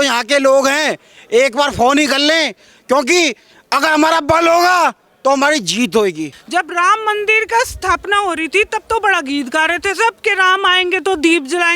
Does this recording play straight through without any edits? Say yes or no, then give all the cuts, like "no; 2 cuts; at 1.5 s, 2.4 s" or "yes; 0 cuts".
no; 1 cut; at 6.3 s